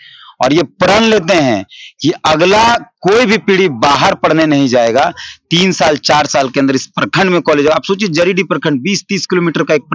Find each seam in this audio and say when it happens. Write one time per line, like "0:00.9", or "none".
none